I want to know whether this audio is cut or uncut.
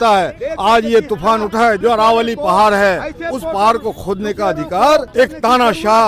cut